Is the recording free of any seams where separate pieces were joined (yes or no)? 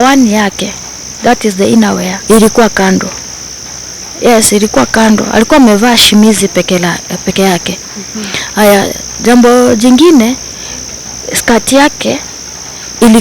no